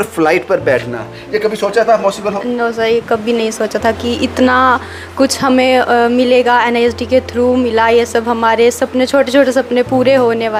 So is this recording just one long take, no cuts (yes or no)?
yes